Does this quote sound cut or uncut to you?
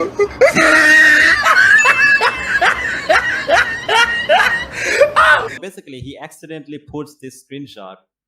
cut